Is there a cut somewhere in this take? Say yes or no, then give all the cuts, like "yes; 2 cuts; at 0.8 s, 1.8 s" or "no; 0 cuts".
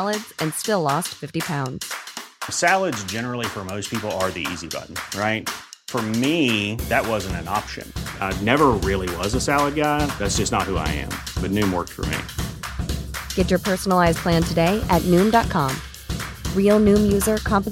no; 0 cuts